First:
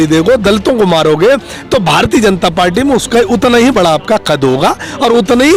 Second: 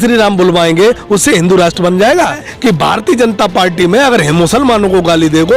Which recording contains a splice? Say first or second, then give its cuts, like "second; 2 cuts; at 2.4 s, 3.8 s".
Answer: second; 1 cut; at 2.5 s